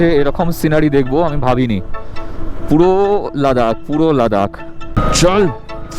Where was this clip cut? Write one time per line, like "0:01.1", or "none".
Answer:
0:04.9